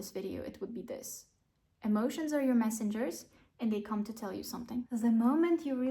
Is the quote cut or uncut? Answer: cut